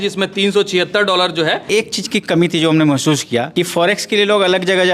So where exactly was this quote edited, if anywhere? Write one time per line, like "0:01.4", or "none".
0:01.7
0:03.5

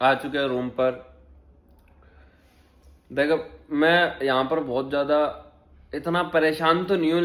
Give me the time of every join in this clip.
none

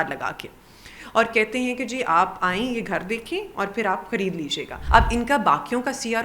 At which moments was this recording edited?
0:04.7

